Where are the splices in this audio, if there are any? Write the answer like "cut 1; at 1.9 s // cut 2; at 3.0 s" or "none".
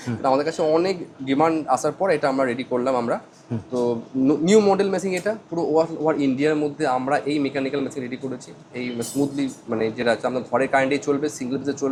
none